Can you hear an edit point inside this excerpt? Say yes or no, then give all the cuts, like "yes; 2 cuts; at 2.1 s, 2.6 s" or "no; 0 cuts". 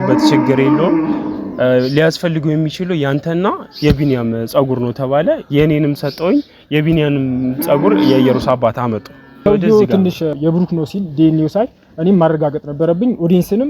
yes; 2 cuts; at 9.4 s, 10.3 s